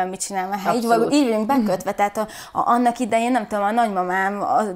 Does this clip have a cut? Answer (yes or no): no